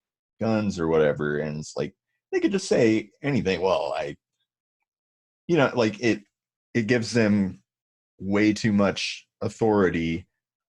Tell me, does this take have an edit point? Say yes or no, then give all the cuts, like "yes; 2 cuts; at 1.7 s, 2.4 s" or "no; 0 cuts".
no; 0 cuts